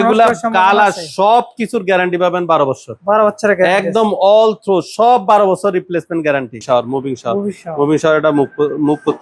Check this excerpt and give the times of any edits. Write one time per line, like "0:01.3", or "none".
0:06.6